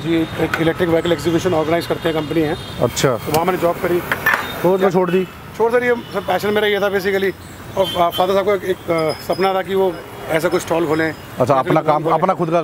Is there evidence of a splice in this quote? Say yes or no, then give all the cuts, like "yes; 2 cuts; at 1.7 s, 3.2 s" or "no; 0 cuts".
no; 0 cuts